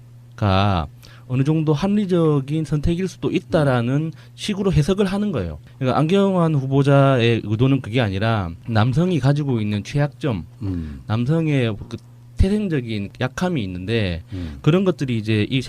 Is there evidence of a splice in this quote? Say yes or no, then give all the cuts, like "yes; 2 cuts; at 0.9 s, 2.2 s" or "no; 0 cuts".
yes; 1 cut; at 10.4 s